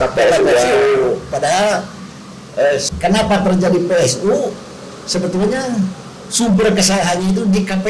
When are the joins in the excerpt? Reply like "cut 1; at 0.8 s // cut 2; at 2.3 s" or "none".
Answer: cut 1; at 2.8 s

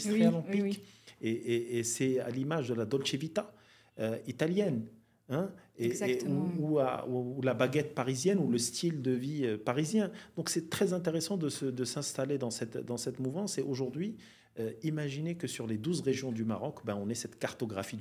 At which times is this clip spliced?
none

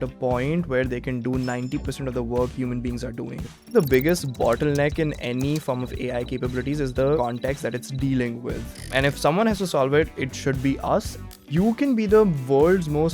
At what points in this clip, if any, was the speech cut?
cut 1; at 3.7 s // cut 2; at 7.2 s // cut 3; at 8.9 s // cut 4; at 11.3 s

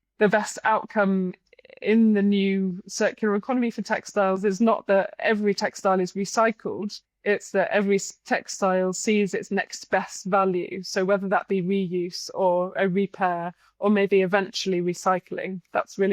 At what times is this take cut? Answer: none

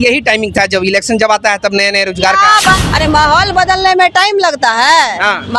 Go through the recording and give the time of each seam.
cut 1; at 2.7 s

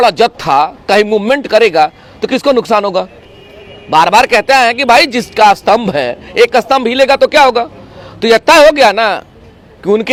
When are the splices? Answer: none

